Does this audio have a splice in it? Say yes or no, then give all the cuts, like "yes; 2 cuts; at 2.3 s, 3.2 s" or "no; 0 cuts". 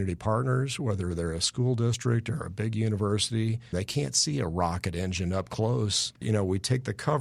yes; 2 cuts; at 3.7 s, 6.2 s